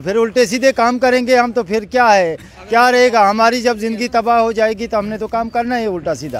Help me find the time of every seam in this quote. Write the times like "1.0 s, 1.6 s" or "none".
none